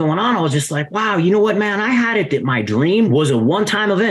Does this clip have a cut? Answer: yes; 1 cut; at 3.1 s

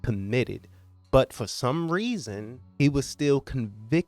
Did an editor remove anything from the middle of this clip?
yes; 1 cut; at 2.6 s

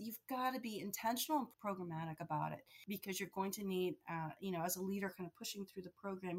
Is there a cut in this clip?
yes; 2 cuts; at 1.5 s, 2.7 s

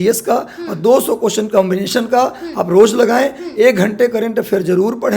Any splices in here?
no; 0 cuts

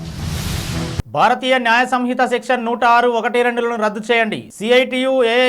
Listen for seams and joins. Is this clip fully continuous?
no; 1 cut; at 1.0 s

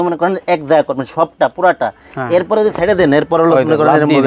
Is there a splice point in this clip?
no; 0 cuts

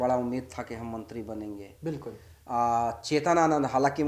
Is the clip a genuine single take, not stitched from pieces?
yes; 0 cuts

